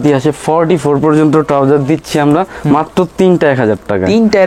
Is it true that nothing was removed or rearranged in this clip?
yes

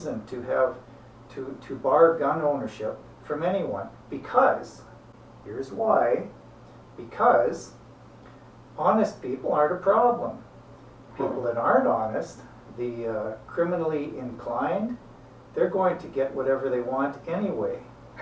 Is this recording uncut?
yes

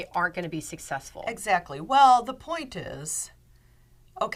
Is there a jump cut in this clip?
no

